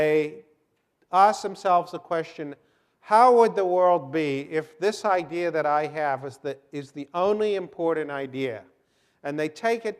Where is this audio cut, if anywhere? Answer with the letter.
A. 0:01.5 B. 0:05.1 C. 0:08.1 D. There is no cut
C